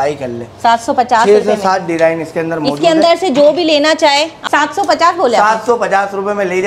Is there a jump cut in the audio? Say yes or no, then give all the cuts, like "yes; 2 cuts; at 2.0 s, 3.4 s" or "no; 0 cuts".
yes; 1 cut; at 4.4 s